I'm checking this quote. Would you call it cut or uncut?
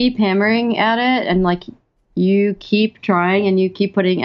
uncut